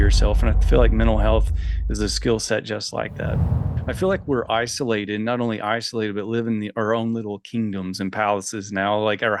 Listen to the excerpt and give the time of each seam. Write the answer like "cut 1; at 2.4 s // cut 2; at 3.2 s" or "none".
cut 1; at 3.7 s